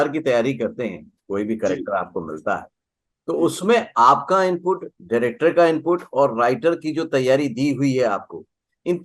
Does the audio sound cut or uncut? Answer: uncut